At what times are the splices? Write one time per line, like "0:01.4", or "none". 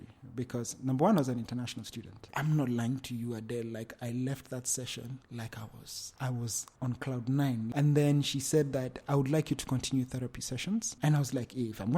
0:02.2
0:06.0
0:07.7